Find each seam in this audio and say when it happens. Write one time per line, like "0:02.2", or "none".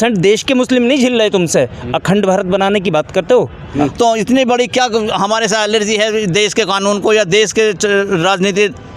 0:03.6